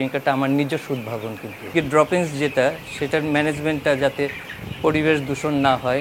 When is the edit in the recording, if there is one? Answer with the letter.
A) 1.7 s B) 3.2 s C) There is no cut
A